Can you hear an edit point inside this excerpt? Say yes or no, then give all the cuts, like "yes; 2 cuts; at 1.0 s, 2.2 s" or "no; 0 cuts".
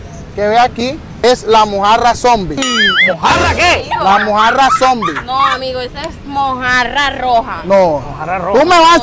yes; 1 cut; at 1.2 s